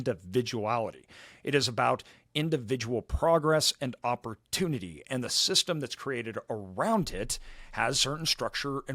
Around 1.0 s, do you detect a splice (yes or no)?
no